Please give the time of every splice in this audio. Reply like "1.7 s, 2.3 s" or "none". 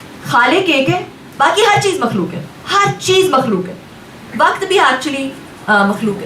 none